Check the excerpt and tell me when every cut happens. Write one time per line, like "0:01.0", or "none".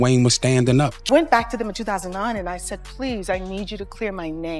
0:01.1